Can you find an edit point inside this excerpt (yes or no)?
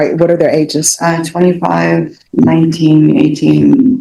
no